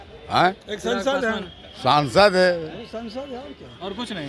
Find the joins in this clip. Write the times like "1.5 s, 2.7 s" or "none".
none

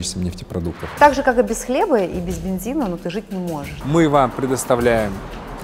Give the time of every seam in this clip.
1.0 s, 3.7 s

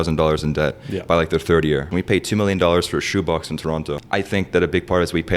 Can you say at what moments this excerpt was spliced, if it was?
1.9 s, 4.0 s

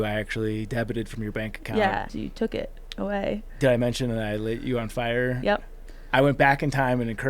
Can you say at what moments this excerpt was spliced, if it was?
2.1 s

